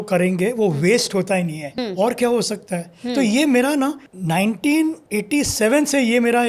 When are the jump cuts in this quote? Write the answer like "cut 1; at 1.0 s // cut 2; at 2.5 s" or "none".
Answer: cut 1; at 1.7 s // cut 2; at 4.1 s // cut 3; at 5.0 s